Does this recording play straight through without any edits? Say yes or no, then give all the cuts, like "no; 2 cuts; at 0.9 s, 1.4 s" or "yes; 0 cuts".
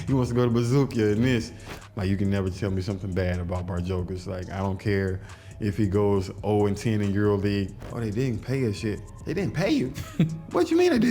no; 2 cuts; at 1.7 s, 7.8 s